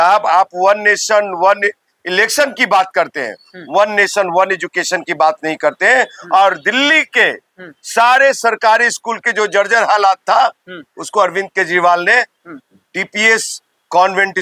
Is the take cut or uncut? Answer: uncut